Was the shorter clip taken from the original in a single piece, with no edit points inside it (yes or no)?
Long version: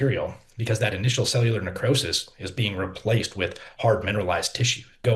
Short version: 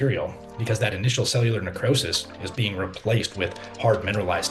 yes